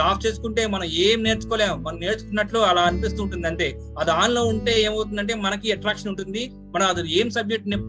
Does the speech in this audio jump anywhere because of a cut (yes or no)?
no